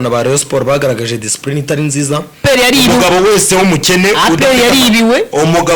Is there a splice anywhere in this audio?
yes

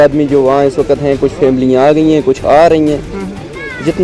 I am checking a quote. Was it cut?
no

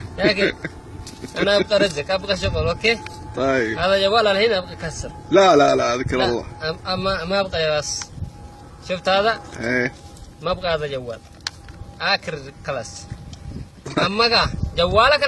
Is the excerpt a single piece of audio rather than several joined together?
yes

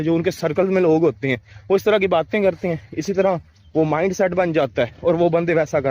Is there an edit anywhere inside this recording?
no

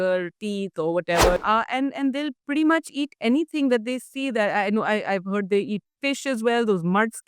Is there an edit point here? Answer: yes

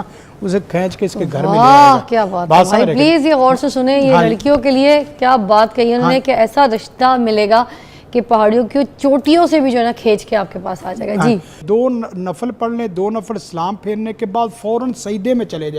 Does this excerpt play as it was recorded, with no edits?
no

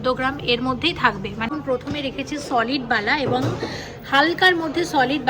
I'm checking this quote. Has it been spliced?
yes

